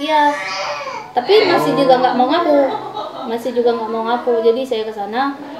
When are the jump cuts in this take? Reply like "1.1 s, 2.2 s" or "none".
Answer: none